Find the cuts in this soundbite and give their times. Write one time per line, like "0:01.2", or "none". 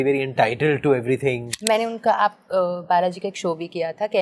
0:01.5